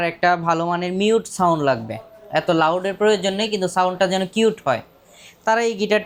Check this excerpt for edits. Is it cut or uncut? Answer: uncut